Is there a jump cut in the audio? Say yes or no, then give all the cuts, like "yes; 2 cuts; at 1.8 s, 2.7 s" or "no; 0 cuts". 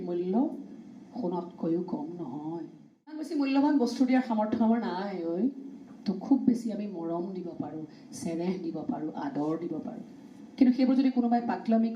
yes; 1 cut; at 3.3 s